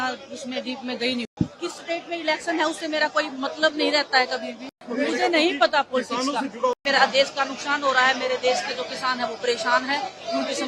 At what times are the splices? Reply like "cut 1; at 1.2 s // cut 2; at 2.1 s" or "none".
cut 1; at 1.3 s // cut 2; at 4.8 s // cut 3; at 6.7 s